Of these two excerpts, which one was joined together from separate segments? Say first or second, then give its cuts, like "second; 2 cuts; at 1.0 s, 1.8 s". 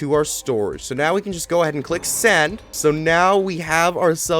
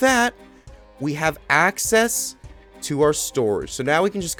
first; 1 cut; at 2.7 s